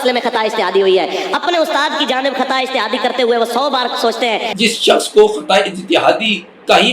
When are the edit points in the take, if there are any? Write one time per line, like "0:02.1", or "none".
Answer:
0:04.5